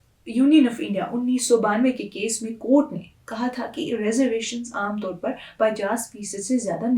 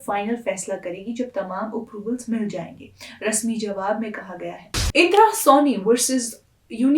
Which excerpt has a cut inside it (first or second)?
second